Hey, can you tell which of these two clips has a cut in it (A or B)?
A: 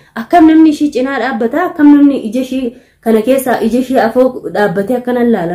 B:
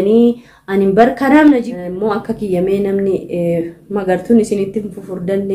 B